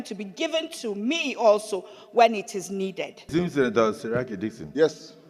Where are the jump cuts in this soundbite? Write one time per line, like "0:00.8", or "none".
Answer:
0:03.1